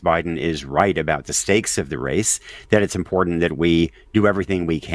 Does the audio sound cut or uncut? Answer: uncut